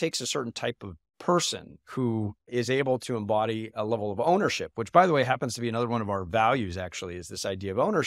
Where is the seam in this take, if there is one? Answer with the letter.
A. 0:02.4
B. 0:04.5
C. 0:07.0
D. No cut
A